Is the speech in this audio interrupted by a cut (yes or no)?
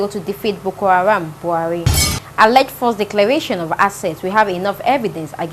no